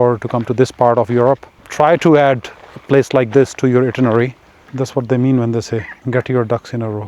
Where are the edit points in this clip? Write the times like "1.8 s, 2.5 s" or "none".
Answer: 1.6 s, 4.6 s, 5.9 s